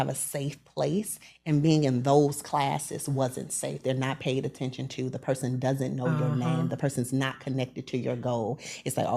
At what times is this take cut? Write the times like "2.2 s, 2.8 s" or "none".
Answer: none